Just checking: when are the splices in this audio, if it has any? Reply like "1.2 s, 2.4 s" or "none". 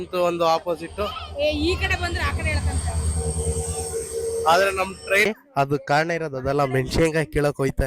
5.2 s